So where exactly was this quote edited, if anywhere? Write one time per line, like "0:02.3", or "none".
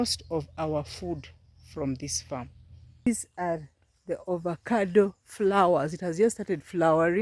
0:03.1